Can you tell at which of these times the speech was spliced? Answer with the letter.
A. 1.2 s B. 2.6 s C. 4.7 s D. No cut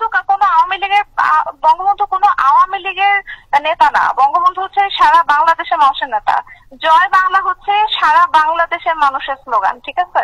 D